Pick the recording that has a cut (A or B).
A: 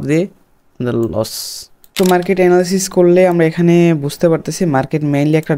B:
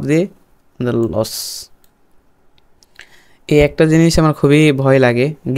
A